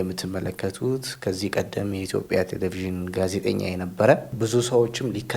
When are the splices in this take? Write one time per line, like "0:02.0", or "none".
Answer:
0:04.3